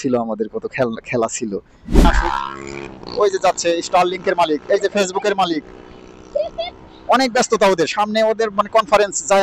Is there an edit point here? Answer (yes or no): yes